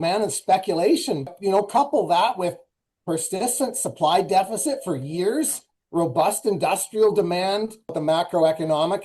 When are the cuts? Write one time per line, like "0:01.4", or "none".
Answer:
0:01.3
0:08.0